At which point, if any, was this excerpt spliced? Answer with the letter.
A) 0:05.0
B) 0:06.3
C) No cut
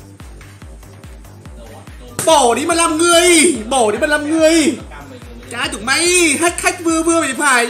C